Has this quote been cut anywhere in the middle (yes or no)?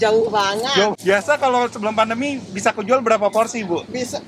yes